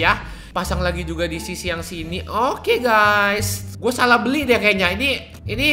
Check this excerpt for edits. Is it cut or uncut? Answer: cut